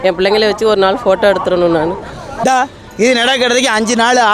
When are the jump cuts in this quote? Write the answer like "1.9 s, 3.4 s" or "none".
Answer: 2.4 s